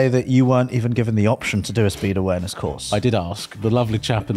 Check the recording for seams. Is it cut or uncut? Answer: cut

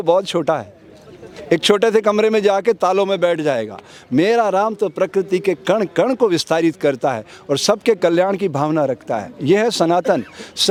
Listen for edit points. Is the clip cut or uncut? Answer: uncut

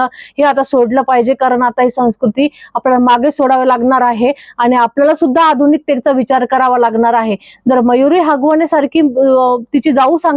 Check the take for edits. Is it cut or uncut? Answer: uncut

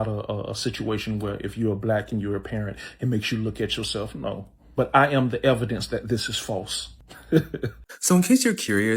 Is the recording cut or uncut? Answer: cut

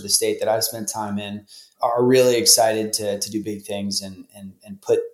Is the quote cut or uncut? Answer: uncut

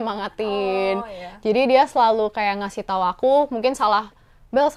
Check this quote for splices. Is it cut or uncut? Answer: uncut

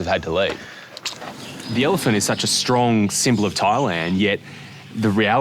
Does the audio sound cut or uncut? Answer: cut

